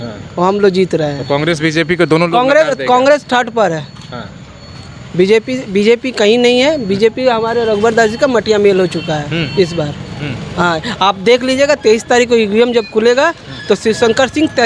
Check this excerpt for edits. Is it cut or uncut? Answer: uncut